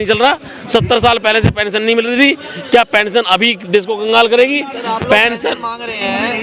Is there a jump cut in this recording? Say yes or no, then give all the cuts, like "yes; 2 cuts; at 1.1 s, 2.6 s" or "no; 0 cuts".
no; 0 cuts